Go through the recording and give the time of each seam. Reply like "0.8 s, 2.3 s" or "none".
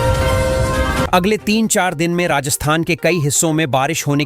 1.1 s